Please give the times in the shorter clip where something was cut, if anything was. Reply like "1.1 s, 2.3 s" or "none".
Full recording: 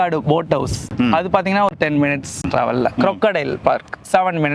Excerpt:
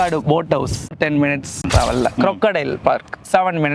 0.9 s